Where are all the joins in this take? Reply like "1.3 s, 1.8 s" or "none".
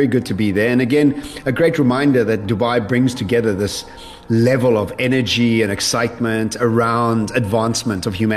none